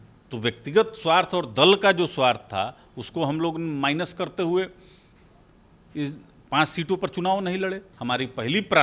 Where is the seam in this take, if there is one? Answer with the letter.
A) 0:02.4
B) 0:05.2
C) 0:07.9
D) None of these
C